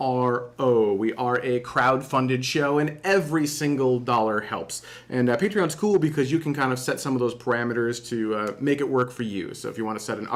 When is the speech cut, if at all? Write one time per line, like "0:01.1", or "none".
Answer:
none